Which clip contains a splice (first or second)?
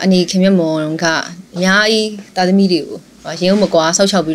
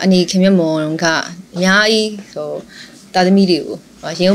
first